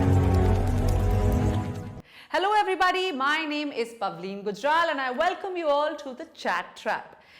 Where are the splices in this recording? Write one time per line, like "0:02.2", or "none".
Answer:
0:01.7